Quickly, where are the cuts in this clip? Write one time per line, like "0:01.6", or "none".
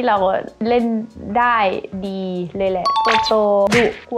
0:03.1